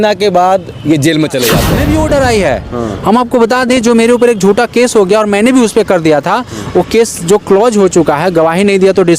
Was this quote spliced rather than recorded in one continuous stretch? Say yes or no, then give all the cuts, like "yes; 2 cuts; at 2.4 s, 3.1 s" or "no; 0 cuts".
yes; 1 cut; at 1.7 s